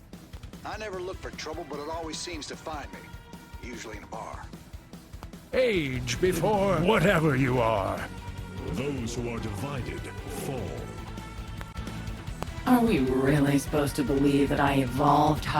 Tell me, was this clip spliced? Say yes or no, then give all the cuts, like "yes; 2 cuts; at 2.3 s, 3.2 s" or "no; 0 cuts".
yes; 1 cut; at 6.8 s